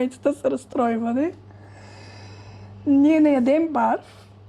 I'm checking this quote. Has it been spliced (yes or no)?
no